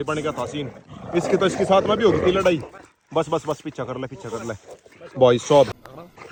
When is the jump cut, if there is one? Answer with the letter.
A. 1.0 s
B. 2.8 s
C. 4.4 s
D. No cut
D